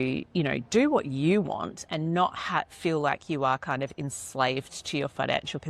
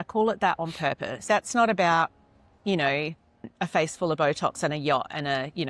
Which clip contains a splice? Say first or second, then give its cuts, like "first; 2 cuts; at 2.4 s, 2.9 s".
second; 2 cuts; at 1.2 s, 3.5 s